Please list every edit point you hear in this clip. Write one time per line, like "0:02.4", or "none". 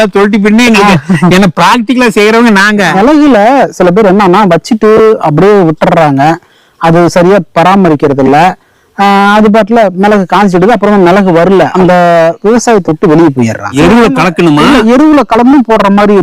0:03.0
0:11.7
0:13.8